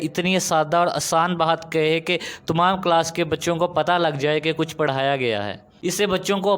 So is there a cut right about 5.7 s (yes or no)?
yes